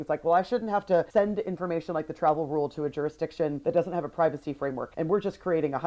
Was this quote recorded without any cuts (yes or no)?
no